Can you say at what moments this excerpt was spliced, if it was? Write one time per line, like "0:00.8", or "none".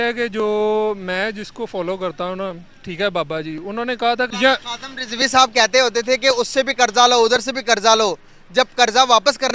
0:04.3